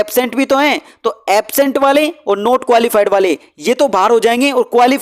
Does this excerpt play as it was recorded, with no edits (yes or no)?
yes